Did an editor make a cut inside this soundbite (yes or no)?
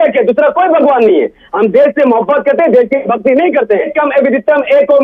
yes